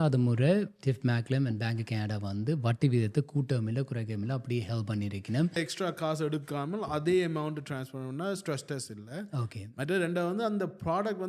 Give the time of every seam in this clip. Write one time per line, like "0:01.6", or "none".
0:05.6